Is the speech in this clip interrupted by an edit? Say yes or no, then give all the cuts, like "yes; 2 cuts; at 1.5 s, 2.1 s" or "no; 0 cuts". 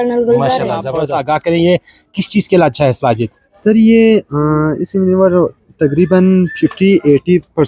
yes; 1 cut; at 0.9 s